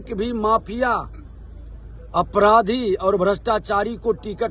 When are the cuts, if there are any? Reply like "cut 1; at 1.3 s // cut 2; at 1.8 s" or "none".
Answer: none